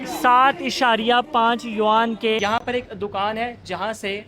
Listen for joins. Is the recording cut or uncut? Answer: cut